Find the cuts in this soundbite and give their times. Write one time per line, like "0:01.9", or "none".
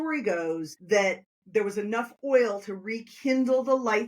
0:00.9